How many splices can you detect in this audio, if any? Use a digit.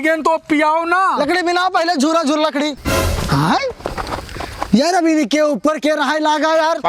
1